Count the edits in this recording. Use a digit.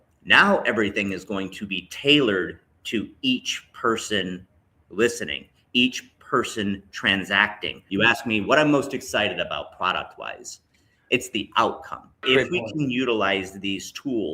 2